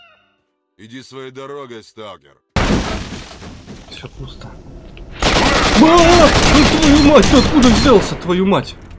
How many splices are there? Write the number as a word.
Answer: one